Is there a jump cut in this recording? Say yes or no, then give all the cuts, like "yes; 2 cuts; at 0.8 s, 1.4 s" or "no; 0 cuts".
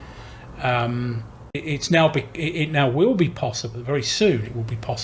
yes; 1 cut; at 1.6 s